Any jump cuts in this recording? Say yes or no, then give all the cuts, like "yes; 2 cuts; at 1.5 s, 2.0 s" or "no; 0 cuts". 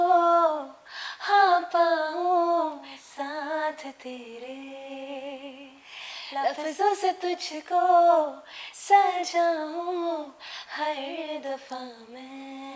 no; 0 cuts